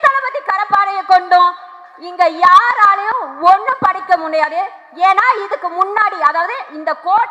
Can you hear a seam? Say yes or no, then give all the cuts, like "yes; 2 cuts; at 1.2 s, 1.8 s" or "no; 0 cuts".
no; 0 cuts